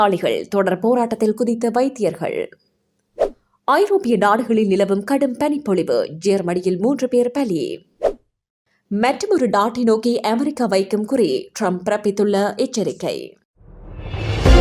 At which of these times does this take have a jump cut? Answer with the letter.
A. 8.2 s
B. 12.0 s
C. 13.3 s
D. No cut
C